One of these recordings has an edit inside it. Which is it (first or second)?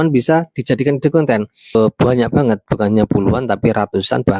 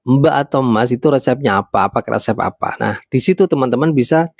first